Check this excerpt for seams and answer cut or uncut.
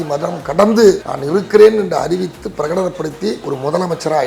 cut